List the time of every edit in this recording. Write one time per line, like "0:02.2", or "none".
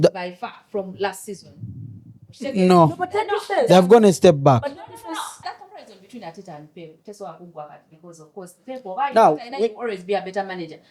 0:05.4